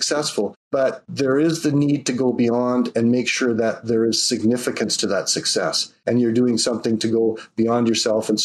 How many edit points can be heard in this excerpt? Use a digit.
2